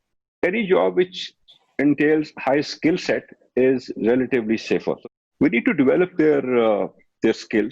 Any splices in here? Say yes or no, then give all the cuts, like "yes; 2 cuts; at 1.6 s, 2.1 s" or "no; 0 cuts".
yes; 1 cut; at 5.0 s